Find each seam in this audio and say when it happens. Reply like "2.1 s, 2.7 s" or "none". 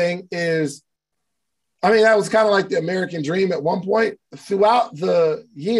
4.3 s